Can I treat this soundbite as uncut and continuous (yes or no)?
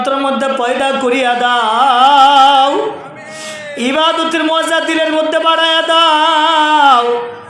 yes